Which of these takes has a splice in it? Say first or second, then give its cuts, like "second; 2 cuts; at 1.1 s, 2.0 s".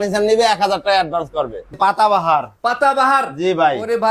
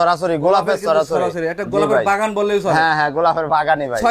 first; 1 cut; at 1.7 s